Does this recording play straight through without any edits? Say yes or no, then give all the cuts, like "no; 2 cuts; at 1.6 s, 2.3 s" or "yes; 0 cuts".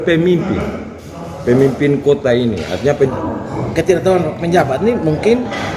no; 1 cut; at 3.1 s